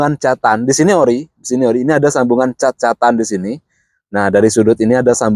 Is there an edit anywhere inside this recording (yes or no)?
no